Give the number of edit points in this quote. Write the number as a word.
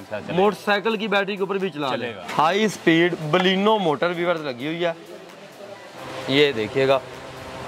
two